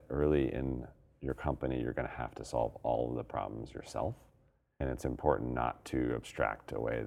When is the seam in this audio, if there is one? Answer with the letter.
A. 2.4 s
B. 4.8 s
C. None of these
B